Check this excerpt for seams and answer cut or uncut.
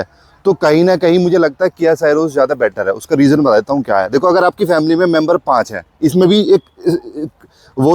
uncut